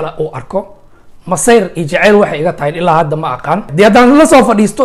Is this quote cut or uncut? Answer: cut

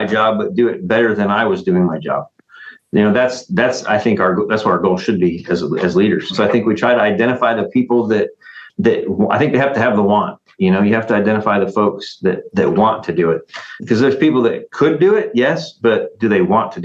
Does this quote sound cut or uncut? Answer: uncut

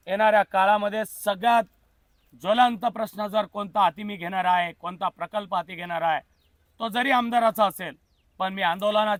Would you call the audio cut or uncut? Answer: uncut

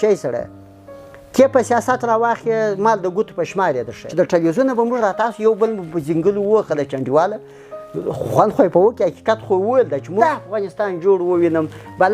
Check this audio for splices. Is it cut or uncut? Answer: cut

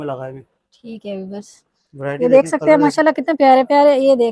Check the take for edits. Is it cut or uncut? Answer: uncut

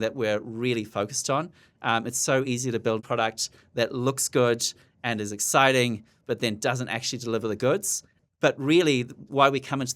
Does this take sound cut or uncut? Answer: cut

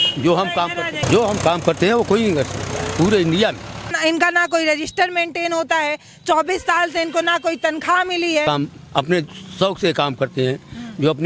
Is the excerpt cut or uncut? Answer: cut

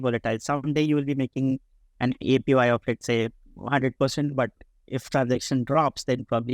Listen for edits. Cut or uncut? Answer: uncut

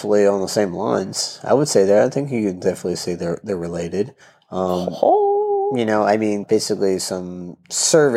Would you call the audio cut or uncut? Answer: cut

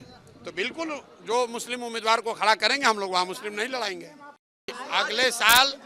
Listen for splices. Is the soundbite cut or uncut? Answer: cut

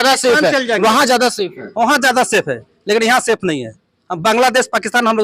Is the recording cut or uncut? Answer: uncut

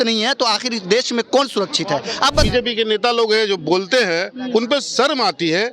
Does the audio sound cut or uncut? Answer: cut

